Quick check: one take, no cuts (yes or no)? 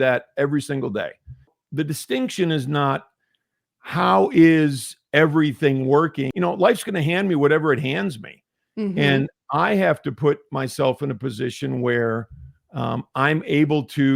no